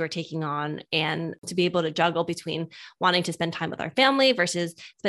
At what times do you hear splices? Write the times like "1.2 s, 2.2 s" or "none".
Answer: 1.4 s